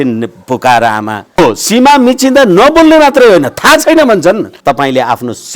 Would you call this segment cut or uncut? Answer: cut